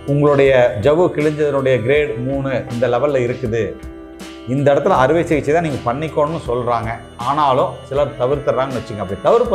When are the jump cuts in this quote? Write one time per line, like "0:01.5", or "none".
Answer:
none